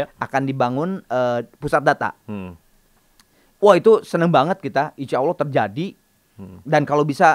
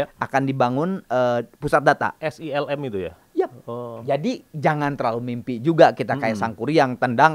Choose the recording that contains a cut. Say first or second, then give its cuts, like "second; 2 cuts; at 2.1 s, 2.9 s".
second; 1 cut; at 2.2 s